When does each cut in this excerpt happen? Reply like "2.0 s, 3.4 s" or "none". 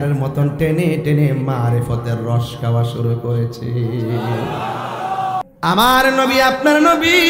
5.4 s